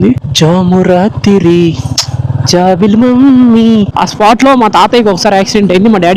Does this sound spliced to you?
yes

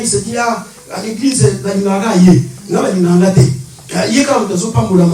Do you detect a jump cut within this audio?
no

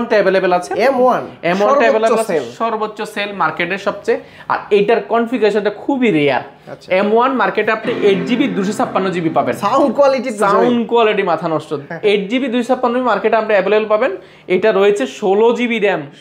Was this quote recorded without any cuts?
yes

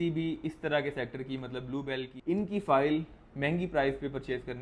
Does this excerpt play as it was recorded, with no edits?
no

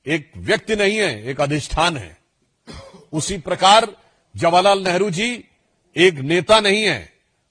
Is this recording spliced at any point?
no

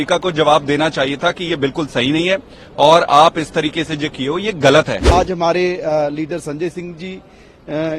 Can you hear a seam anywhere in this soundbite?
yes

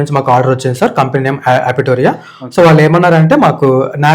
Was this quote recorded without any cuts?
yes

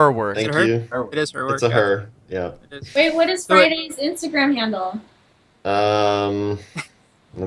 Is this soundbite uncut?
yes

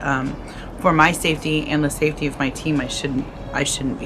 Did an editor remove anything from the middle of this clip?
no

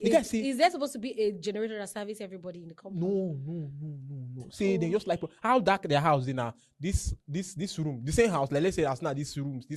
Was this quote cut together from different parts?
no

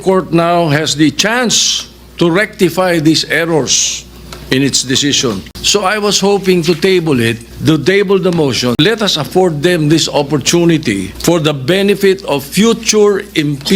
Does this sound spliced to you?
yes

